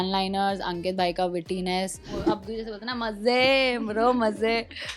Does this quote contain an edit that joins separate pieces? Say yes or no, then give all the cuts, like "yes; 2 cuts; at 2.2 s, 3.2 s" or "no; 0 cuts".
yes; 1 cut; at 2.3 s